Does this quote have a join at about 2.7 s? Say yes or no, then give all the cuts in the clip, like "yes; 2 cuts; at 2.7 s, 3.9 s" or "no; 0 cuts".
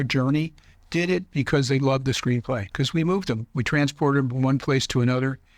yes; 1 cut; at 2.7 s